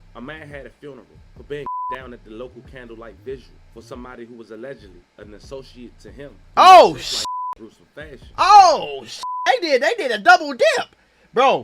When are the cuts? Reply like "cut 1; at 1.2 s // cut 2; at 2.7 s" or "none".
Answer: none